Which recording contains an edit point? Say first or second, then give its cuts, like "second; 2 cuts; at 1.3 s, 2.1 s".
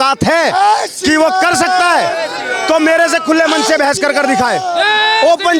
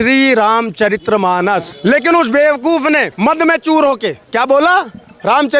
second; 3 cuts; at 1.7 s, 3.1 s, 4.2 s